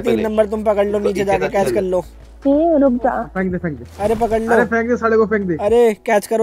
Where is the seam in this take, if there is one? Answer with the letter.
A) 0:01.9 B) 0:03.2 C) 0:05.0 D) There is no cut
B